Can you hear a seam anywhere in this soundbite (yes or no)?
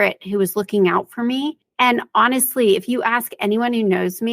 yes